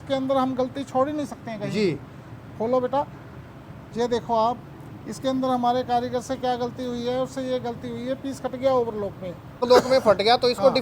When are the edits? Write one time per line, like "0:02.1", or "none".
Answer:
0:09.6